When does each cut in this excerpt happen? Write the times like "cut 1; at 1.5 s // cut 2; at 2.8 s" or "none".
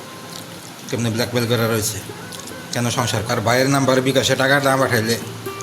cut 1; at 3.3 s